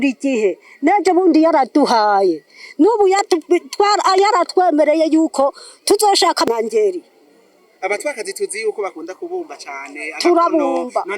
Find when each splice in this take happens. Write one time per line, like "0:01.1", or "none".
0:06.5